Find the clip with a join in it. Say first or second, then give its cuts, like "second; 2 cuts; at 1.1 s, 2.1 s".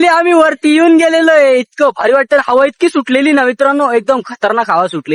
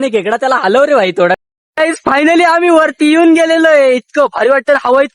second; 1 cut; at 1.4 s